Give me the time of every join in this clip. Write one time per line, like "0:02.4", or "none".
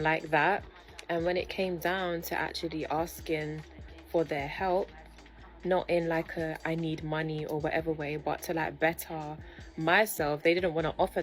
none